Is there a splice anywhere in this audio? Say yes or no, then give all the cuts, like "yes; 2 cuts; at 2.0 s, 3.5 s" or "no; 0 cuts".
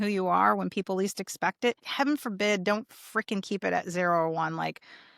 yes; 1 cut; at 1.8 s